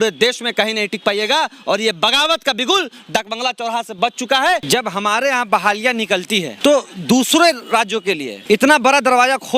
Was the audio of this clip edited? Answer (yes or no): yes